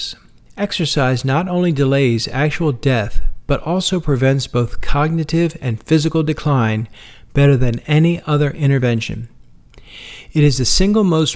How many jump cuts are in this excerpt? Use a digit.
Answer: 0